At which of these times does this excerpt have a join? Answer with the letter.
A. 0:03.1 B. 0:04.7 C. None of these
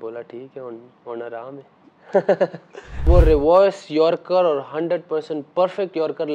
A